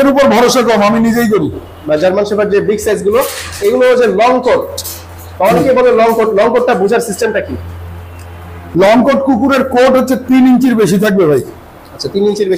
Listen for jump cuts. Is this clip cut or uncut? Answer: cut